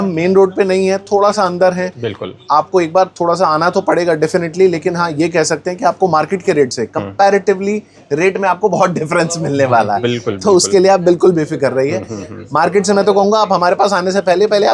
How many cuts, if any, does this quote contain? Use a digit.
1